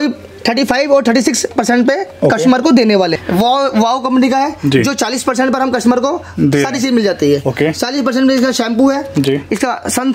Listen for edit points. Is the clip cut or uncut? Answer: cut